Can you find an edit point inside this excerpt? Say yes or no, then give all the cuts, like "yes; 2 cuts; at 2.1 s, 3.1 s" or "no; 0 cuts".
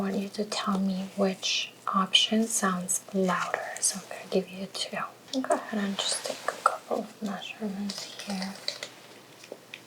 yes; 1 cut; at 5.2 s